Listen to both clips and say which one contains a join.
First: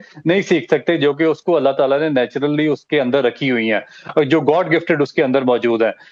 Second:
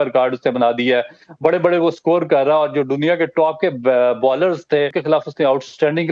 second; 1 cut; at 5.0 s

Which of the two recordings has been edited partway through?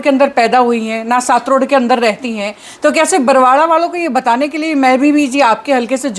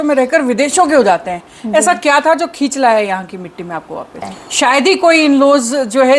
second; 1 cut; at 4.3 s

